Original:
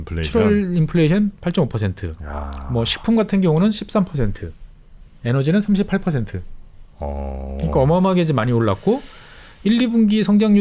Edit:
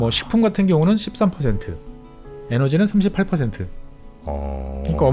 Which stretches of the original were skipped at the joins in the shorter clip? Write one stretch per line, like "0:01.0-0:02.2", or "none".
none